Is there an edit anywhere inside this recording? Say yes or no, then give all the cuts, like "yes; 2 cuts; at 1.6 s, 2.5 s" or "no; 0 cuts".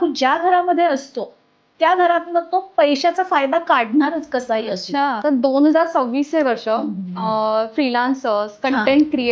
yes; 1 cut; at 5.1 s